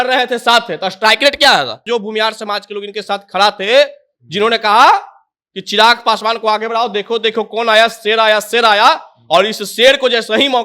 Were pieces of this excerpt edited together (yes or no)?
yes